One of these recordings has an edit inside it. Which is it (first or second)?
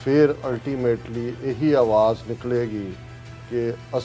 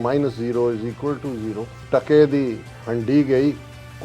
second